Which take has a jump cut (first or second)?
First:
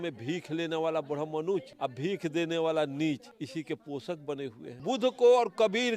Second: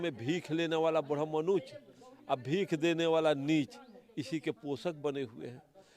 first